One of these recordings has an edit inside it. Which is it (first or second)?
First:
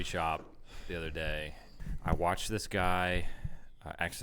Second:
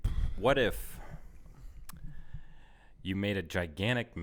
first